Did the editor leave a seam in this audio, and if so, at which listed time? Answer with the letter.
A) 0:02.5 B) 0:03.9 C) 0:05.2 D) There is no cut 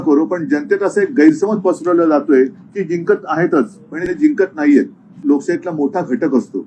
C